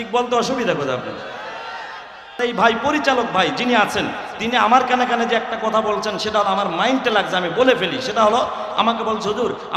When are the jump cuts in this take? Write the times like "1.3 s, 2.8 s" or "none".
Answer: 2.4 s